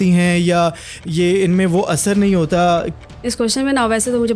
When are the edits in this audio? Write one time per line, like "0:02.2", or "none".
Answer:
0:02.9